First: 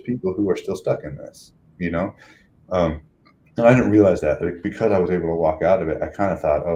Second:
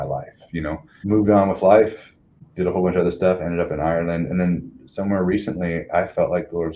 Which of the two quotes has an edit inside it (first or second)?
second